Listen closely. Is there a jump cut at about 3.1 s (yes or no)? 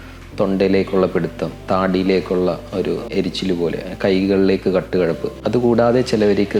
yes